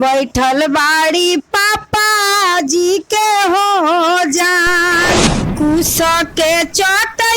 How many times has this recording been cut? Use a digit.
1